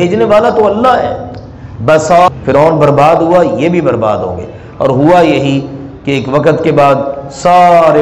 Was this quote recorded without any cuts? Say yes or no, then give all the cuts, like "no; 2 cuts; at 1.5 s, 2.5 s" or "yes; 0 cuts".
no; 1 cut; at 2.3 s